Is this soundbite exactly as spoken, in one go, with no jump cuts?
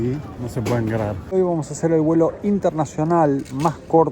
no; 1 cut; at 1.3 s

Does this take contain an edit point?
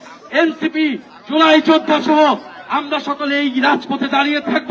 no; 0 cuts

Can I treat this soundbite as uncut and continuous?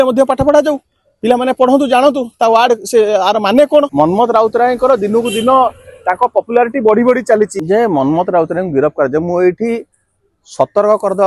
no; 2 cuts; at 3.9 s, 7.6 s

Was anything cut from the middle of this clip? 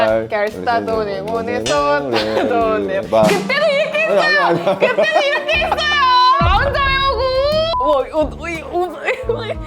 yes; 2 cuts; at 6.4 s, 7.7 s

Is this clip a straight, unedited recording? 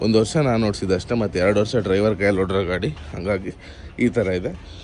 yes; 0 cuts

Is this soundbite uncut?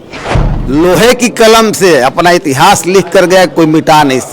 yes; 0 cuts

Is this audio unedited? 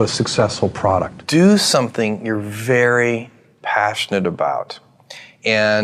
no; 1 cut; at 1.3 s

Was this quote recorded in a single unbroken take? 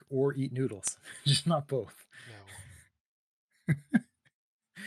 yes; 0 cuts

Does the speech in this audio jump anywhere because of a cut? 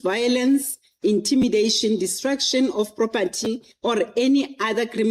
yes; 1 cut; at 3.7 s

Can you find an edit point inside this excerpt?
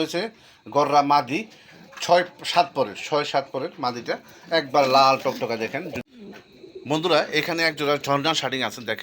yes; 1 cut; at 6.1 s

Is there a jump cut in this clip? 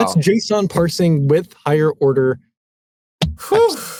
no; 0 cuts

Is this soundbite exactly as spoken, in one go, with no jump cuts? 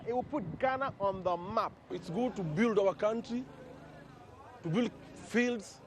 no; 1 cut; at 2.0 s

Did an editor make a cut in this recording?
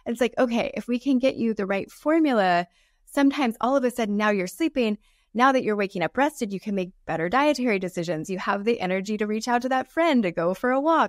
no; 0 cuts

